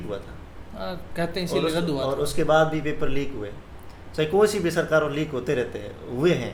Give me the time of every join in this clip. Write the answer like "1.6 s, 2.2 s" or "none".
none